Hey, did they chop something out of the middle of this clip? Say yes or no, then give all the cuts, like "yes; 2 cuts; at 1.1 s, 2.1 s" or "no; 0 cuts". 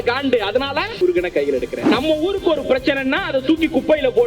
yes; 2 cuts; at 0.9 s, 1.9 s